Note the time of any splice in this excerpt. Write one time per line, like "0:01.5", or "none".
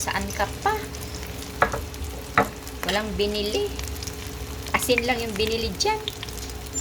none